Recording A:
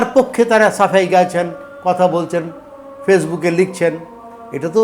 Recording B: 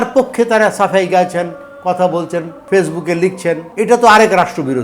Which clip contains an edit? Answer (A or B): B